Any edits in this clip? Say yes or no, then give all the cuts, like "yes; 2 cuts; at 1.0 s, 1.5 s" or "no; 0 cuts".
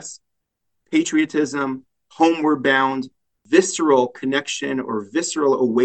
yes; 1 cut; at 3.3 s